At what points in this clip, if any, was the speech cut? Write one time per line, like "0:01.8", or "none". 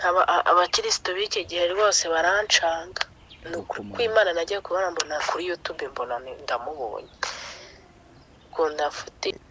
none